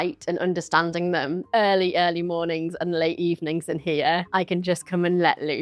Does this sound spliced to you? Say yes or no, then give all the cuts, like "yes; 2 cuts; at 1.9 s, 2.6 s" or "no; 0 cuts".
yes; 1 cut; at 1.4 s